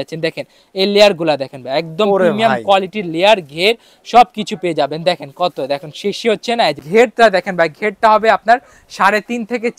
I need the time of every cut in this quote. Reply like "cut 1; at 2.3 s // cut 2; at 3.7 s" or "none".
cut 1; at 6.8 s